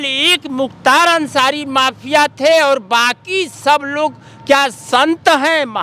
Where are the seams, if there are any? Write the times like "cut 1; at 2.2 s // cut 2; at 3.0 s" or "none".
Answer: none